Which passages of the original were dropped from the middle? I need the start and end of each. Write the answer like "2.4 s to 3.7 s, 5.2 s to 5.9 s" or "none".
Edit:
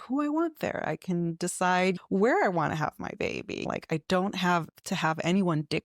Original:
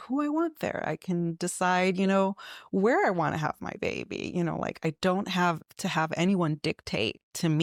2.0 s to 2.6 s, 4.3 s to 4.6 s